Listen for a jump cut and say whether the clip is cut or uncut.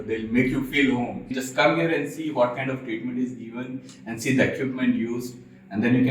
cut